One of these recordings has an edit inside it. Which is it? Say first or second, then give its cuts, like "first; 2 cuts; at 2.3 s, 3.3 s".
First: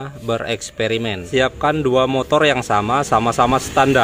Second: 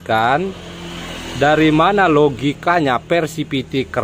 first; 1 cut; at 1.3 s